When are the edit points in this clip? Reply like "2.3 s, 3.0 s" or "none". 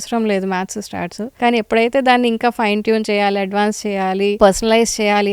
1.2 s, 4.4 s